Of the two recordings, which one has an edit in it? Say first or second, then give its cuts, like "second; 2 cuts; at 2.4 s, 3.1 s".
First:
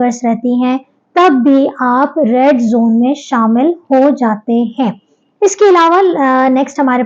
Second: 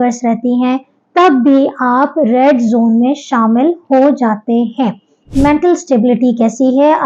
second; 1 cut; at 5.2 s